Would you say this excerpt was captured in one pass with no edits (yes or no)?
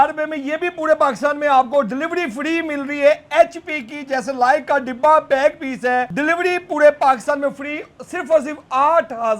no